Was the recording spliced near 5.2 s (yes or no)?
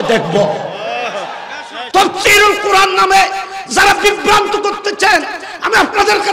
no